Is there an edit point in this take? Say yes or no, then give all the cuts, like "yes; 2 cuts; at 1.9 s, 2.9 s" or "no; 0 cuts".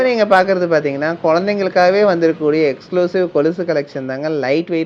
no; 0 cuts